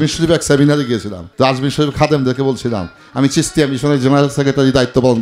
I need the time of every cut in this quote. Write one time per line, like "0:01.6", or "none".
0:01.2